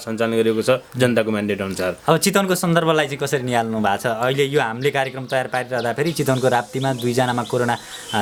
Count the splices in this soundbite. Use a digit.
0